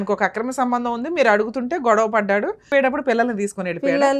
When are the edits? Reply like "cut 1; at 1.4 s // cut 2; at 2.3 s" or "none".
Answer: cut 1; at 2.7 s